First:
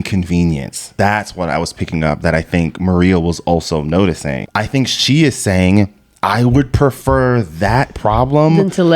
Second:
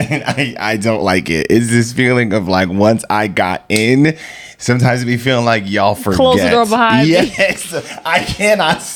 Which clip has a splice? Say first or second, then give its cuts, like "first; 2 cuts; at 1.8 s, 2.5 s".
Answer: first; 2 cuts; at 0.8 s, 4.4 s